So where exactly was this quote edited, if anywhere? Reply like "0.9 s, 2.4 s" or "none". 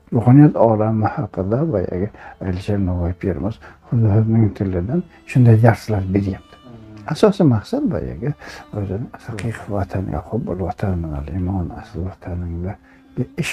9.3 s